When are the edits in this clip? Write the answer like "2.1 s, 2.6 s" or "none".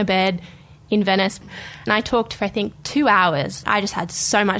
1.9 s